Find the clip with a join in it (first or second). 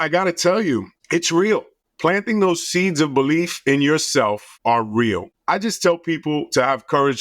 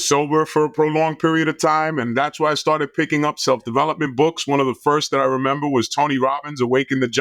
first